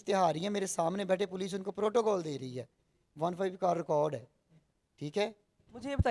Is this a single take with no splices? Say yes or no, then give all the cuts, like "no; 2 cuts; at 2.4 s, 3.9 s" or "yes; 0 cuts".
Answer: yes; 0 cuts